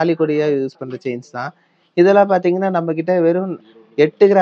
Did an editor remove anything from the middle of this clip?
no; 0 cuts

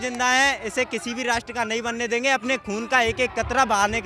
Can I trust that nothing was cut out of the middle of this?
yes; 0 cuts

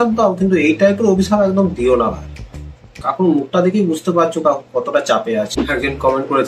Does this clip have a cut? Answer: yes; 1 cut; at 5.5 s

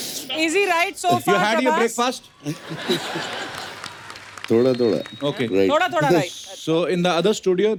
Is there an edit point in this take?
no; 0 cuts

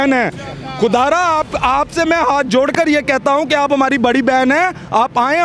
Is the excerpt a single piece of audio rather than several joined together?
yes; 0 cuts

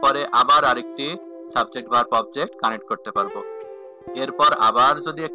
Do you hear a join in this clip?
no; 0 cuts

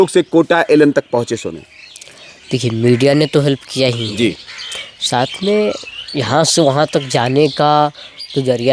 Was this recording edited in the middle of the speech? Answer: no; 0 cuts

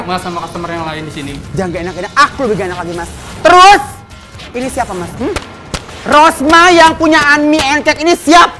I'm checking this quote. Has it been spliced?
no; 0 cuts

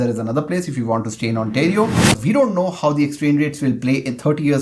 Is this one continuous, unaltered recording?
no; 1 cut; at 2.2 s

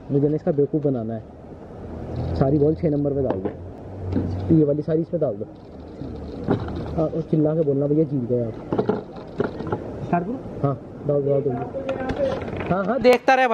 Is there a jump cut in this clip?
no; 0 cuts

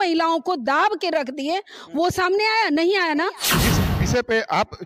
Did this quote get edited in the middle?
yes; 1 cut; at 3.6 s

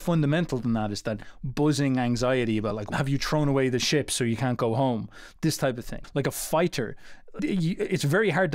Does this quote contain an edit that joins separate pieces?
yes; 3 cuts; at 2.8 s, 5.9 s, 7.4 s

